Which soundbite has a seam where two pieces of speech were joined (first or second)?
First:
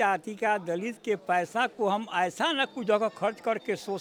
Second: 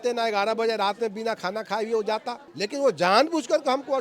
second